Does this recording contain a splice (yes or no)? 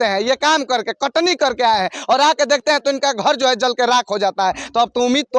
no